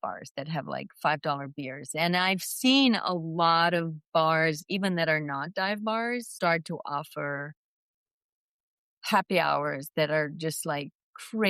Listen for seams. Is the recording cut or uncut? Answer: uncut